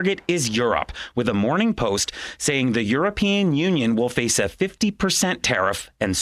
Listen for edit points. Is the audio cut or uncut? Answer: uncut